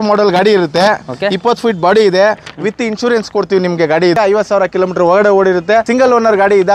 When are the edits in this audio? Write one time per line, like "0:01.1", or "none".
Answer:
0:04.2
0:05.9